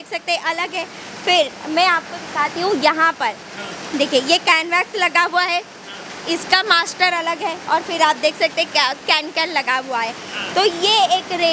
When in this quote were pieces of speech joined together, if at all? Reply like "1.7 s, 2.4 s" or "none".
none